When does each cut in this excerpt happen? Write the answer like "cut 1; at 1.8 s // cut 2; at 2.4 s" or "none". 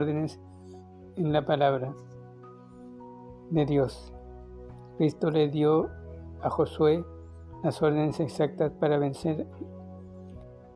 none